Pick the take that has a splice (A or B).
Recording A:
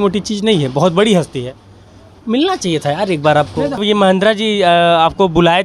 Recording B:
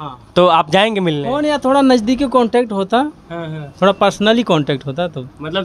A